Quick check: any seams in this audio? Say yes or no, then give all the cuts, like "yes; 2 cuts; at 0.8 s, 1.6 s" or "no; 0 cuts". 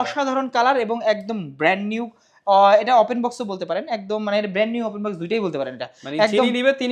no; 0 cuts